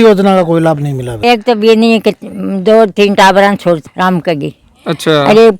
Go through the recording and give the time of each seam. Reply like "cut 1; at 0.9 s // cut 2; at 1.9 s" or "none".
cut 1; at 1.1 s // cut 2; at 3.8 s